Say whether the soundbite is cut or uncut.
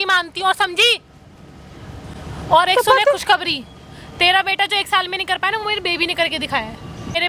uncut